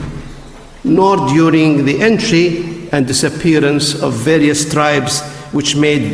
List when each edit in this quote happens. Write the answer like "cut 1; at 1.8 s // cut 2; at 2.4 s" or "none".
cut 1; at 1.0 s